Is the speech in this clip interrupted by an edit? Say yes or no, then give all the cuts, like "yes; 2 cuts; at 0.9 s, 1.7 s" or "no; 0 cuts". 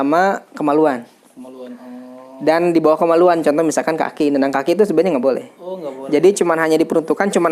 no; 0 cuts